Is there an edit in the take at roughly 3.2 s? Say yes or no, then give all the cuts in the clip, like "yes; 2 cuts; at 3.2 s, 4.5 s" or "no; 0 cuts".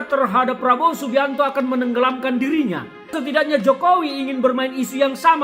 yes; 1 cut; at 3.2 s